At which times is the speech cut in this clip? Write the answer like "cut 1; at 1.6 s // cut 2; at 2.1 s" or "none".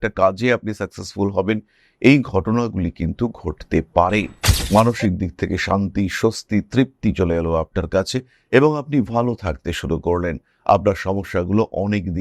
cut 1; at 4.4 s